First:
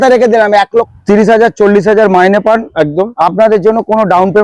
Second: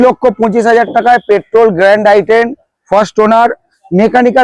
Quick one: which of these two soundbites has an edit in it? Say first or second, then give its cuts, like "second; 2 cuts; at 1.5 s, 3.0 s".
first; 1 cut; at 0.9 s